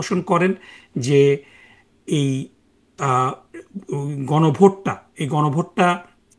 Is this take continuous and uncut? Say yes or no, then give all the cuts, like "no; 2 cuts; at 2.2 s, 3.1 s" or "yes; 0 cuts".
yes; 0 cuts